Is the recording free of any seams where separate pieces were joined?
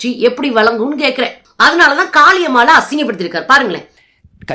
yes; 0 cuts

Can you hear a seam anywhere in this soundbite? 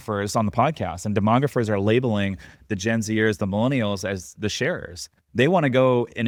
no; 0 cuts

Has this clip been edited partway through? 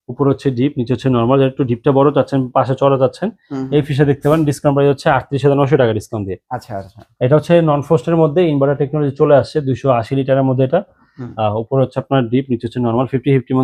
no; 0 cuts

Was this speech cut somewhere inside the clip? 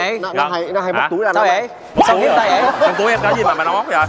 no; 0 cuts

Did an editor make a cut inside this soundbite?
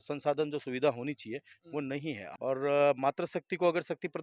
yes; 1 cut; at 2.2 s

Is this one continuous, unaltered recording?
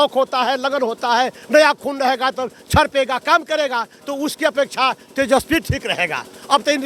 yes; 0 cuts

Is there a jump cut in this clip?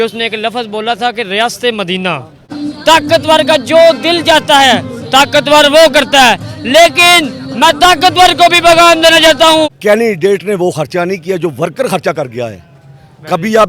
yes; 2 cuts; at 2.6 s, 9.7 s

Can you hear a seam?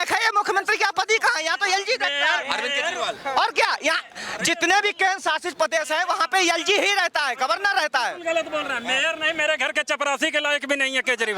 no; 0 cuts

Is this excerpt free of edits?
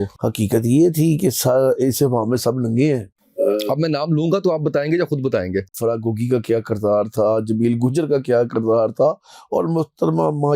no; 2 cuts; at 3.2 s, 5.8 s

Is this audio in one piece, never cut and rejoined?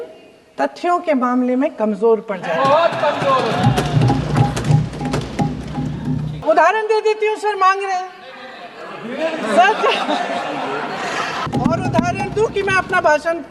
no; 2 cuts; at 6.4 s, 11.5 s

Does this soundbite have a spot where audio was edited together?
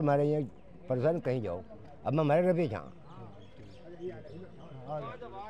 no; 0 cuts

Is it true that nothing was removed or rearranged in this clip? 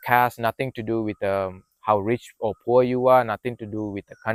yes; 0 cuts

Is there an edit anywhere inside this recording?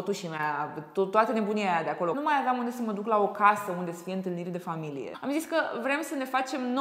yes; 2 cuts; at 2.1 s, 5.1 s

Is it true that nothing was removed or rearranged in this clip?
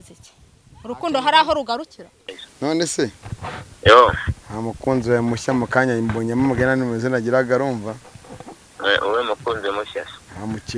no; 1 cut; at 2.4 s

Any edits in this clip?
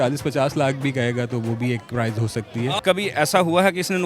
yes; 1 cut; at 2.8 s

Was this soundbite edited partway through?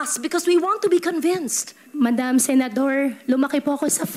yes; 1 cut; at 1.9 s

